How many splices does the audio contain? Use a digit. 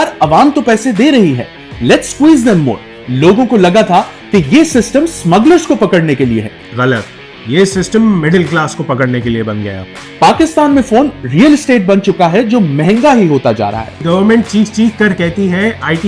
2